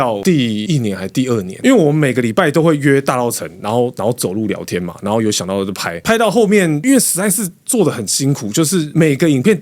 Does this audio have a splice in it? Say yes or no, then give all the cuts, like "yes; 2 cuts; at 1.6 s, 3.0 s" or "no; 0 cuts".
yes; 1 cut; at 5.9 s